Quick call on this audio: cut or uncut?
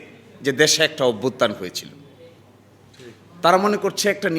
uncut